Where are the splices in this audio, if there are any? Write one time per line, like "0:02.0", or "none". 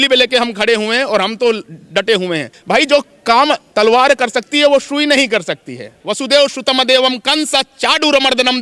0:02.5
0:06.0